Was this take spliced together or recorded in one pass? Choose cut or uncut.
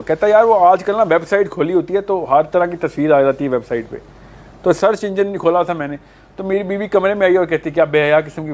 uncut